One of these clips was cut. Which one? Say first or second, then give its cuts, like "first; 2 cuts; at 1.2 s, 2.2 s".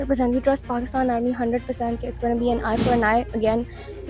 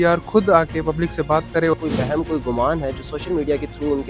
second; 1 cut; at 1.7 s